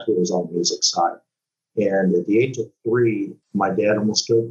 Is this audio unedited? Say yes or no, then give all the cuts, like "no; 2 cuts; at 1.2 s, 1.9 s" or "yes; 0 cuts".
no; 1 cut; at 3.4 s